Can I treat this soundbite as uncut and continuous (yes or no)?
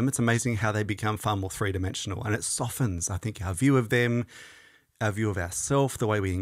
yes